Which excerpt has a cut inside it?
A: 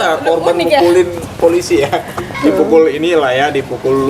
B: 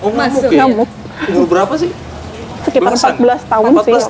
A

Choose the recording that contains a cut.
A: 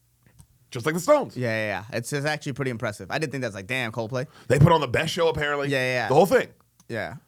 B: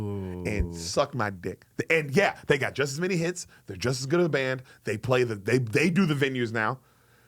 B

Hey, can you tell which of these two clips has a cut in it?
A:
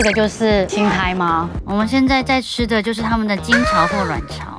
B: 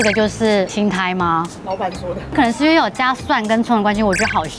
A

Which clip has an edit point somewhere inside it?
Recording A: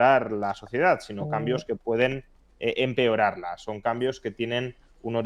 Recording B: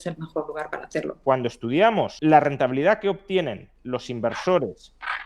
B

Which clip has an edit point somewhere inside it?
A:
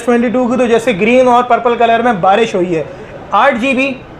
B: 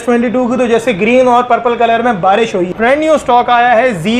B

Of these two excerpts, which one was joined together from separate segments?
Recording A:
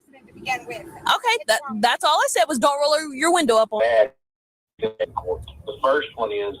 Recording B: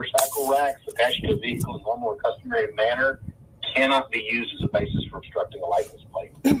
A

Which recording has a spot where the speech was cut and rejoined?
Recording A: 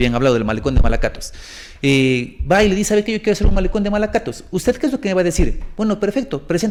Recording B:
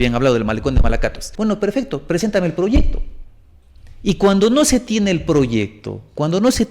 B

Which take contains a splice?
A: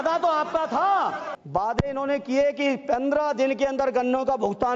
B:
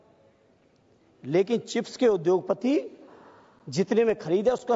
A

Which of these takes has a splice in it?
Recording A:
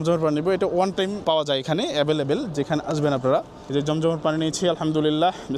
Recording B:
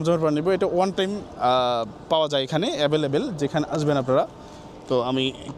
A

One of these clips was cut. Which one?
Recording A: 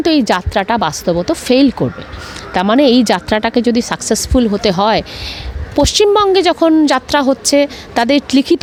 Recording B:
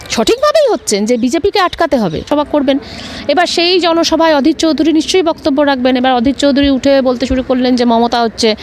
B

